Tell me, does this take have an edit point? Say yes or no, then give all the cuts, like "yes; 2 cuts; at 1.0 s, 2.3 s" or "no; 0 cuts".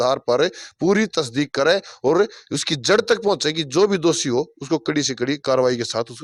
no; 0 cuts